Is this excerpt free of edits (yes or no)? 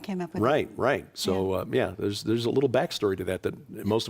no